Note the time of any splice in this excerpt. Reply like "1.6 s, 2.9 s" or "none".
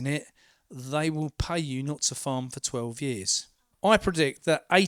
3.7 s